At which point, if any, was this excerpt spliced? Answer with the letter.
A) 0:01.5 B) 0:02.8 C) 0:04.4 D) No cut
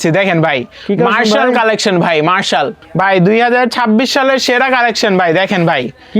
B